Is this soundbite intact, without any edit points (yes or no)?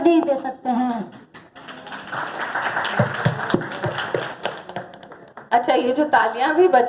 yes